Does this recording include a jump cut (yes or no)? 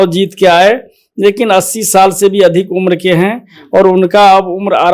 no